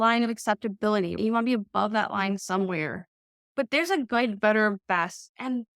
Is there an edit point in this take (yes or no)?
yes